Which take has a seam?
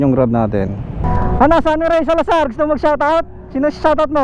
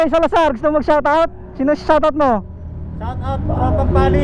first; 1 cut; at 1.0 s

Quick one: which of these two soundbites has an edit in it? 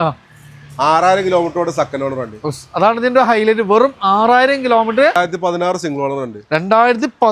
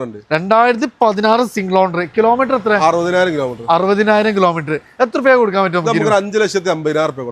first; 1 cut; at 5.1 s

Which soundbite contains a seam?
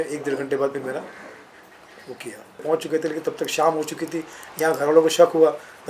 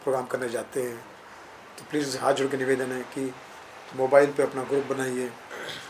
first; 1 cut; at 2.6 s

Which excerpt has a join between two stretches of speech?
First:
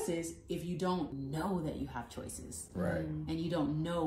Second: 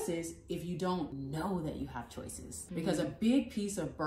second; 1 cut; at 2.7 s

